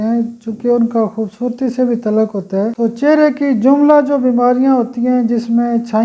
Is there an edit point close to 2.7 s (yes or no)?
yes